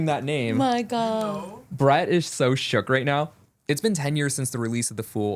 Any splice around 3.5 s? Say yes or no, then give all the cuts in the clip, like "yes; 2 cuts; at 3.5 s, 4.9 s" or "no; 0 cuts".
yes; 1 cut; at 3.5 s